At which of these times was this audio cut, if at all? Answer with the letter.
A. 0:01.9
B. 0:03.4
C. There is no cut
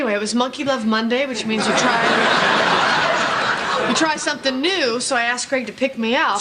A